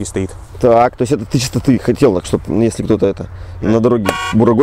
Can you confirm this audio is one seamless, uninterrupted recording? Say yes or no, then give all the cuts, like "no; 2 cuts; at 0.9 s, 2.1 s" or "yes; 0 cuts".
yes; 0 cuts